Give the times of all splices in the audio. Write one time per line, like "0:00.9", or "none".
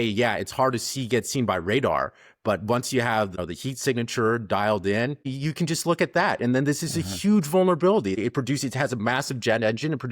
0:03.3
0:05.3
0:08.2

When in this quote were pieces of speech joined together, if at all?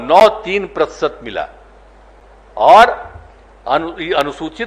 none

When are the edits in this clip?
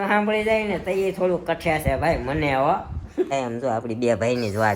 0:03.3

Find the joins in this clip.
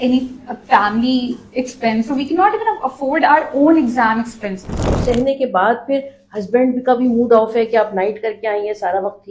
0:05.0

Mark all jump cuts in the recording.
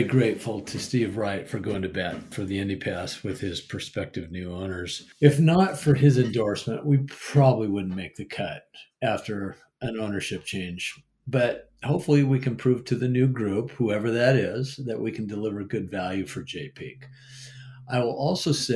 0:02.3
0:05.0

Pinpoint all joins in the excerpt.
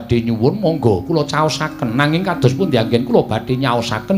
none

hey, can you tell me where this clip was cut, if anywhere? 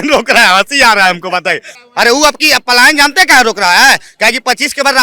0:01.7

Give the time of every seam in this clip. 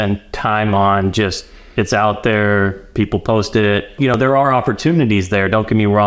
0:04.2

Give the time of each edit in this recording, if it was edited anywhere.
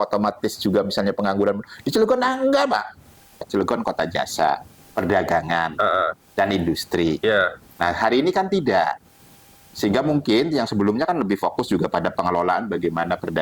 0:03.5

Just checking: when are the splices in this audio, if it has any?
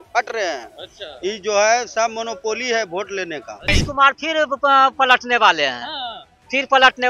0:03.7

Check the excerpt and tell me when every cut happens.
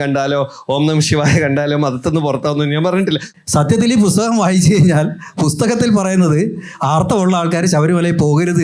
0:03.3

